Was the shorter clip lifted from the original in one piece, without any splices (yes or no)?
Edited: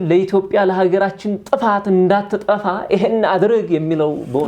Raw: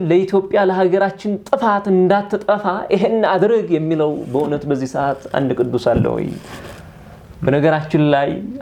yes